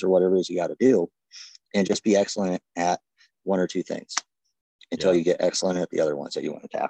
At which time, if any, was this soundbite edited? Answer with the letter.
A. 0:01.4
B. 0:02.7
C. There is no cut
C